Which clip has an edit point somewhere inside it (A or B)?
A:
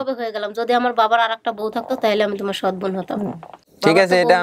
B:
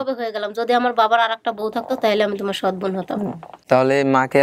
B